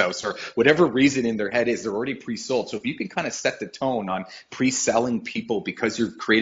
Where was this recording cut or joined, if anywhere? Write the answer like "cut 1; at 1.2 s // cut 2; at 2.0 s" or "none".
none